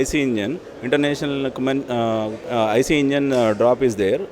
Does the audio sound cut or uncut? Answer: cut